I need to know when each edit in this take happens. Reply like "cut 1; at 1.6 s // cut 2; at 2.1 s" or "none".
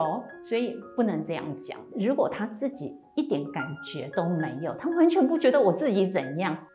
cut 1; at 1.9 s